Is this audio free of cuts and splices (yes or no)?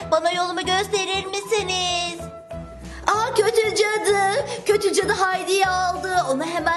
no